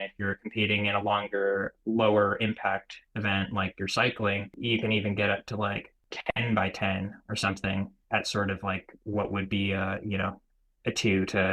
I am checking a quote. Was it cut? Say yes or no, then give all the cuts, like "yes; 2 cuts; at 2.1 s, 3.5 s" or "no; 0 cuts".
yes; 4 cuts; at 1.7 s, 4.5 s, 6.1 s, 8.0 s